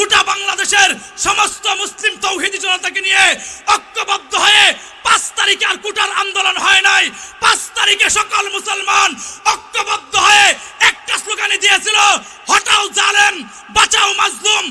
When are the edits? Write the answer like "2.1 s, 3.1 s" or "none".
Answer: none